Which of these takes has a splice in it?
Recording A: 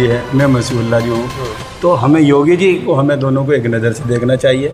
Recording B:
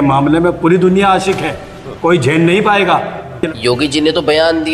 B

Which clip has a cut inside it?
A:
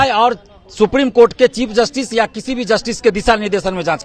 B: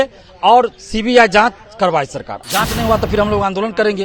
B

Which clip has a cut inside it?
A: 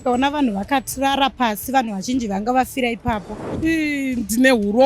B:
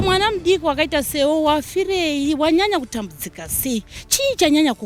A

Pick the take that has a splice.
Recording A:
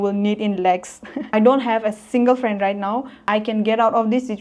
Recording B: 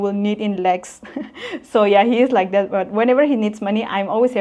A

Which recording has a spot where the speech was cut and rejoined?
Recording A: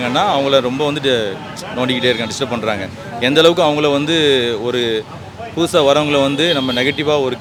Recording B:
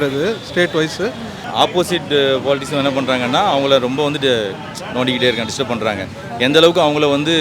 B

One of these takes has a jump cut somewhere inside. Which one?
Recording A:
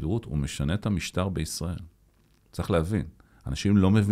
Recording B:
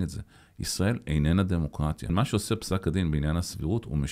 B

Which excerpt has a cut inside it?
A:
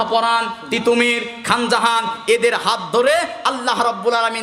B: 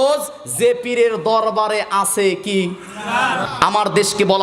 B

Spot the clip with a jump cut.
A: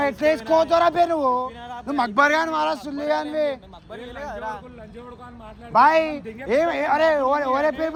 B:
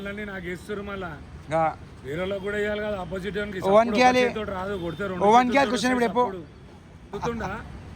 B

